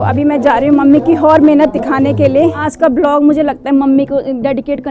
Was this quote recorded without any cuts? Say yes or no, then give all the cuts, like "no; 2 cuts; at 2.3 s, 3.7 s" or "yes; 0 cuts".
no; 1 cut; at 2.6 s